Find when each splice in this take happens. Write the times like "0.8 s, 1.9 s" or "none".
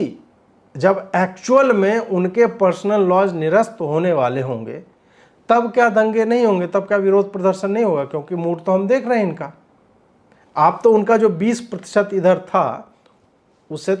none